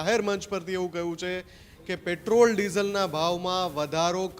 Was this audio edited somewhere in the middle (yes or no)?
no